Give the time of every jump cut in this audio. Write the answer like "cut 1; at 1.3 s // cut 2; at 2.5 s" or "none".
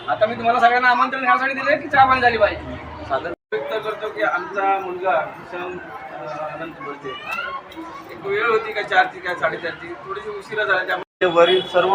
cut 1; at 3.5 s // cut 2; at 11.2 s